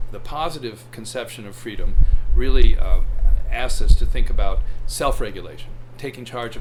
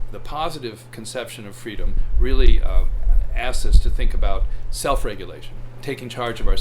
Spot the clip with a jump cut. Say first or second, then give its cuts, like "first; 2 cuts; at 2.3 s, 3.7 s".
second; 1 cut; at 2.0 s